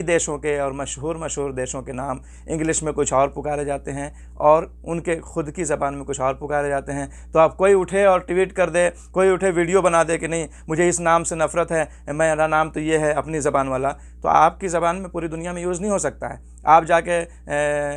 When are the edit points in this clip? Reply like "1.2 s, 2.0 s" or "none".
none